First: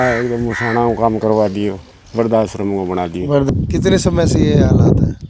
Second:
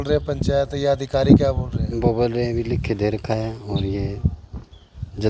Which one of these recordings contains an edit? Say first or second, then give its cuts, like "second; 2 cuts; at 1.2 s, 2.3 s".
first; 2 cuts; at 1.9 s, 3.5 s